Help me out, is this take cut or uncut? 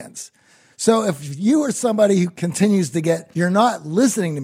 cut